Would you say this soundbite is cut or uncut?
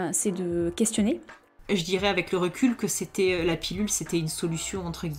cut